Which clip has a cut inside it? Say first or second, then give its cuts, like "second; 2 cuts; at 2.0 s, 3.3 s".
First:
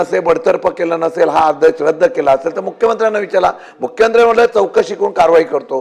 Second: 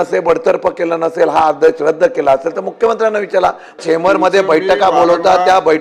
second; 1 cut; at 3.8 s